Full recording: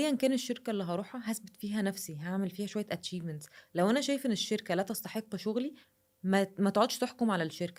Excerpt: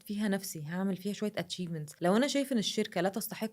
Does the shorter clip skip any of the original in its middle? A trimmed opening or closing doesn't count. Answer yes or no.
yes